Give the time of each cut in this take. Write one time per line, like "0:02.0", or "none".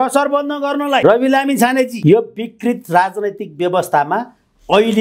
0:01.0
0:01.9